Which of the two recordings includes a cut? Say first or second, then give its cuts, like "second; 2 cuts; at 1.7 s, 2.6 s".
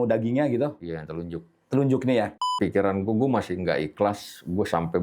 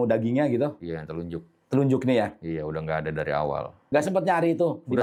first; 1 cut; at 2.5 s